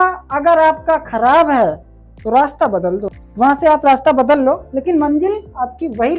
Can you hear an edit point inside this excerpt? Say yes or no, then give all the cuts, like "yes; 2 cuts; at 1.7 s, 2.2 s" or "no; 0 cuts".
yes; 1 cut; at 3.1 s